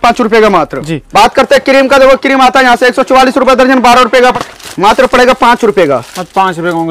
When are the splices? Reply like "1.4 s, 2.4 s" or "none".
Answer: 1.0 s, 4.4 s